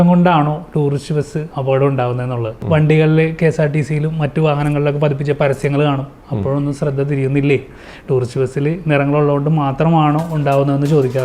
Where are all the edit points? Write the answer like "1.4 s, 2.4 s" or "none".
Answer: 2.5 s